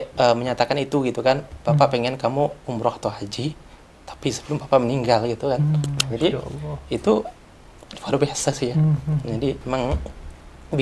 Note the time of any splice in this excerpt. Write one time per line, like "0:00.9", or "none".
none